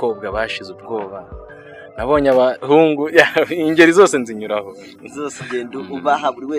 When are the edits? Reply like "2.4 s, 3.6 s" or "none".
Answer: none